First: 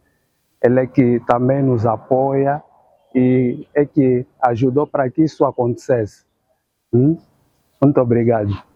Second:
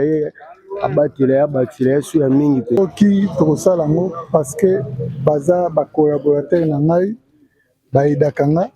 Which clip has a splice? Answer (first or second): second